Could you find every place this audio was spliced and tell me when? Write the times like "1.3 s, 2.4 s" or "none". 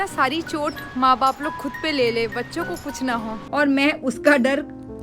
3.4 s